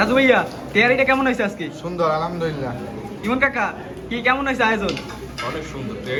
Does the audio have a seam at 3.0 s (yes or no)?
no